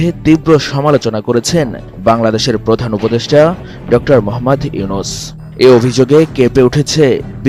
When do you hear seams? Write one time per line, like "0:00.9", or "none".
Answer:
none